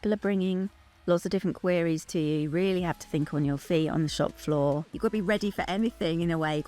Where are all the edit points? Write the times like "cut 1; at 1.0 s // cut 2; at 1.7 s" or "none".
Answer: cut 1; at 4.9 s